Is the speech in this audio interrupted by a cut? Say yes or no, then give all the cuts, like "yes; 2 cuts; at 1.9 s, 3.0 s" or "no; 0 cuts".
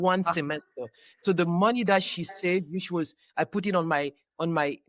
no; 0 cuts